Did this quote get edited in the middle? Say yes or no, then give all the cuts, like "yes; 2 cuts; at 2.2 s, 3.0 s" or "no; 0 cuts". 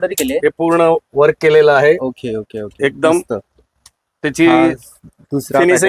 no; 0 cuts